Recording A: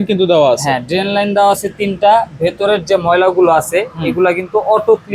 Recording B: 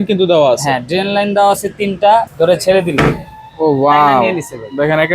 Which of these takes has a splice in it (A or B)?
B